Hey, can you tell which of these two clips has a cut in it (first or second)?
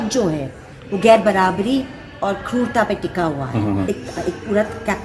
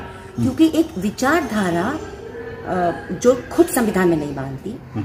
first